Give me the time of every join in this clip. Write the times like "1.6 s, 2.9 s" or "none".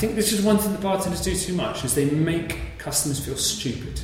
none